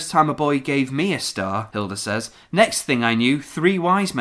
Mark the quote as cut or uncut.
cut